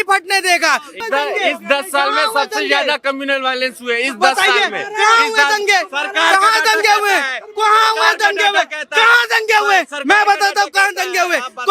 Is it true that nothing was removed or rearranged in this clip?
no; 1 cut; at 1.0 s

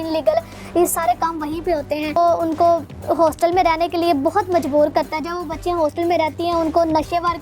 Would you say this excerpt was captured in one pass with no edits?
no; 1 cut; at 2.2 s

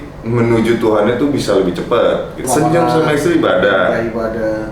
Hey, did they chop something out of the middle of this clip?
yes; 1 cut; at 2.4 s

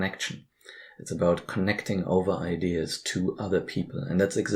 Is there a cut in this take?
no; 0 cuts

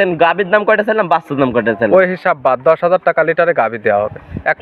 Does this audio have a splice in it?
no; 0 cuts

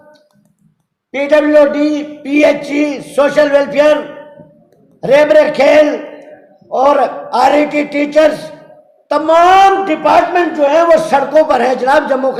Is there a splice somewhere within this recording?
no; 0 cuts

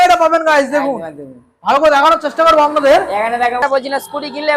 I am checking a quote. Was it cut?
yes; 1 cut; at 3.6 s

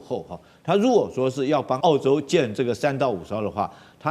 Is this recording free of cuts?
no; 1 cut; at 1.8 s

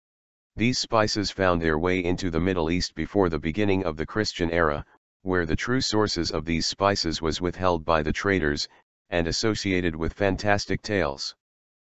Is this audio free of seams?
no; 1 cut; at 7.4 s

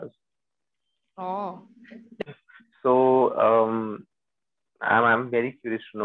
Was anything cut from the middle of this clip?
yes; 1 cut; at 2.2 s

